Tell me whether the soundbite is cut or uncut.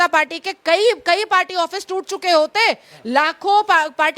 uncut